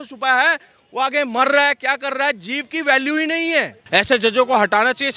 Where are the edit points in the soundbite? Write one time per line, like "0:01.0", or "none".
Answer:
0:03.8